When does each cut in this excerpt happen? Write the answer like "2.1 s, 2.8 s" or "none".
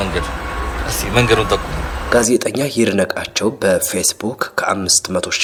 none